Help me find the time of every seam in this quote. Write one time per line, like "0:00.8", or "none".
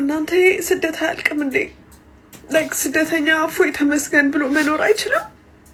none